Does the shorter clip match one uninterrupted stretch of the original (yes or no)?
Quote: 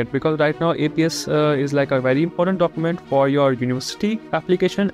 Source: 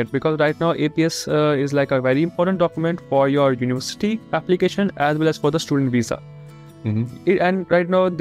yes